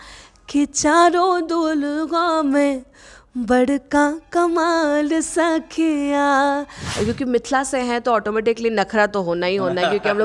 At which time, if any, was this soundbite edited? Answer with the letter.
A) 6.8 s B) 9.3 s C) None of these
A